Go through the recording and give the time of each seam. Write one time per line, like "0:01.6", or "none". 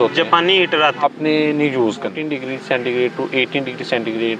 0:01.0
0:02.3